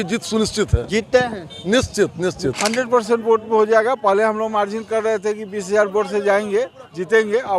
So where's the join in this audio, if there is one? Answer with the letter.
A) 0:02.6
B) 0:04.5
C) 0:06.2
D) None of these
A